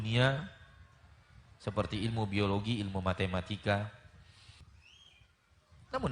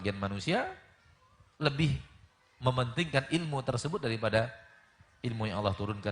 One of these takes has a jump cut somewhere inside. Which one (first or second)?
first